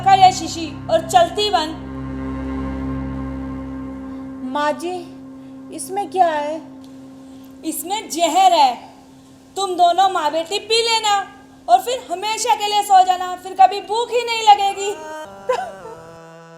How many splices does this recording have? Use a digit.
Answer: 1